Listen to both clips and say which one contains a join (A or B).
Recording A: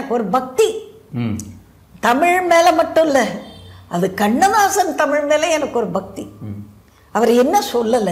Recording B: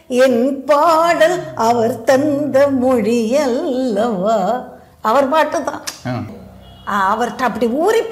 B